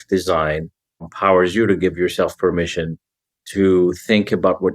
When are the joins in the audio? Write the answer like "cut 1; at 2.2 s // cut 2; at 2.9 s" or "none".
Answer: cut 1; at 1.1 s